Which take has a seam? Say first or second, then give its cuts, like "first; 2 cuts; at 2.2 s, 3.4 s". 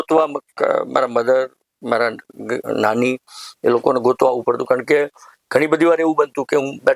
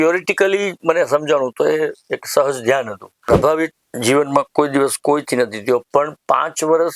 second; 1 cut; at 3.3 s